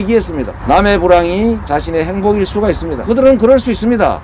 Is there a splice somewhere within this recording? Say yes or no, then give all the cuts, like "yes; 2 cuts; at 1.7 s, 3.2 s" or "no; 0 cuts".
yes; 1 cut; at 3.0 s